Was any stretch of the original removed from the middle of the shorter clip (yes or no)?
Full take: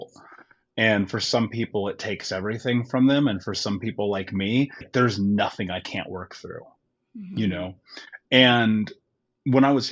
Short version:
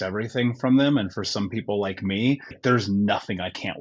no